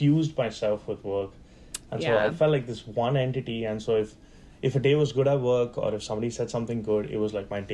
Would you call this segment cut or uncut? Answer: uncut